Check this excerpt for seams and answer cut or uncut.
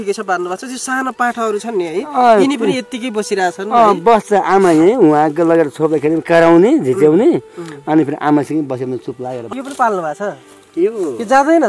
cut